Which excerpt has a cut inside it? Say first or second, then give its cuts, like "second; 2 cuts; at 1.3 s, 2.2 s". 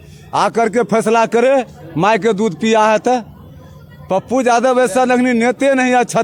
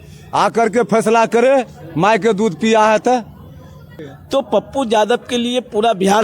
second; 1 cut; at 4.0 s